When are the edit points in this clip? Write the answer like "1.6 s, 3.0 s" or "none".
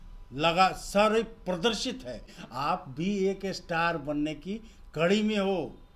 2.3 s